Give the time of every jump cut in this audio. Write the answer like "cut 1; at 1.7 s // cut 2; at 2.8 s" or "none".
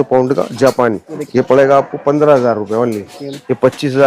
cut 1; at 1.1 s // cut 2; at 3.2 s